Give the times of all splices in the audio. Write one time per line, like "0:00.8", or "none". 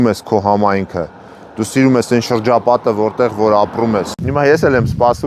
0:04.2